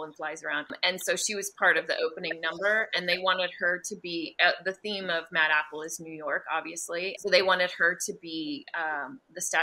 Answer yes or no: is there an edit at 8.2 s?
no